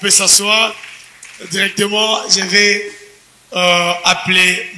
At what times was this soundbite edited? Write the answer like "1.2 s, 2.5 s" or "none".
none